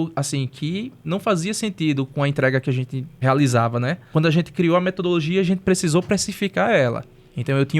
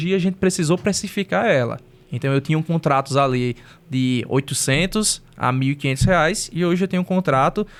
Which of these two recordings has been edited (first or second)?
first